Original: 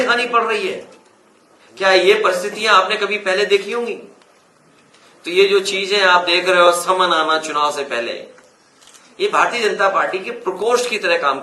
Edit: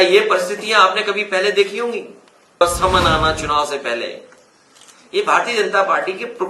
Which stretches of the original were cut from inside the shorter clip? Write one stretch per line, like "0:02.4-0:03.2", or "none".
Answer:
0:04.5-0:06.7